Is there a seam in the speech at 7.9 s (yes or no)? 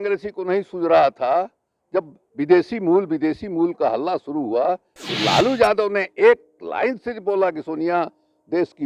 no